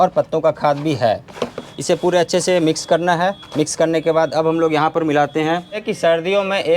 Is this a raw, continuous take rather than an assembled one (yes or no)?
no